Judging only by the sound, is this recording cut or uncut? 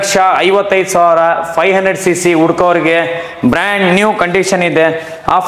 uncut